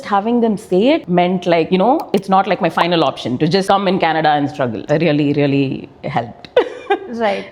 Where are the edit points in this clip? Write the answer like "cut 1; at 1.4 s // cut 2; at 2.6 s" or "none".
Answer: cut 1; at 4.8 s